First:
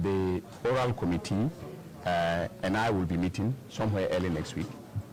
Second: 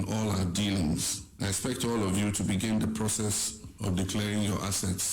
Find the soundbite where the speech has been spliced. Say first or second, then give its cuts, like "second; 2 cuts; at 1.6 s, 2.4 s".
second; 1 cut; at 1.2 s